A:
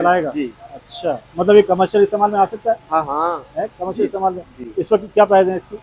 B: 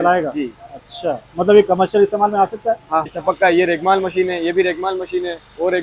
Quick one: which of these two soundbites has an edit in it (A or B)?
B